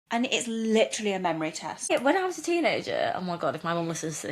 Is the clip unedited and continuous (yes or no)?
no